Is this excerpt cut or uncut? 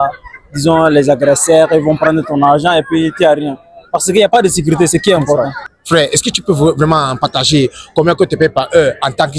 cut